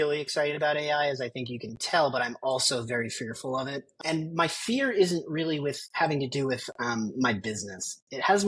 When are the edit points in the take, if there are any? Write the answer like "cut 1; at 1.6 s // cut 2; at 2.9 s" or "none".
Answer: none